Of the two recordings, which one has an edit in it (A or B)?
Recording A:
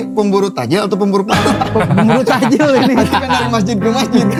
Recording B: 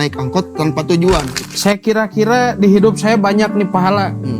B